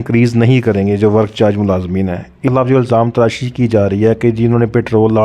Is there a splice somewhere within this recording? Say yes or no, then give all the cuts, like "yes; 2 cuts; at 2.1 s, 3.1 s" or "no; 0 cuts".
yes; 1 cut; at 2.4 s